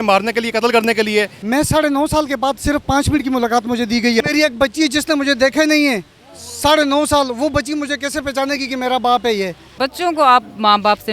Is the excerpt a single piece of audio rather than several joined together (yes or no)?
no